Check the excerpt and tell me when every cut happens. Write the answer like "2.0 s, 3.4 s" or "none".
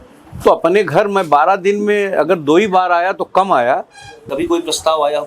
4.1 s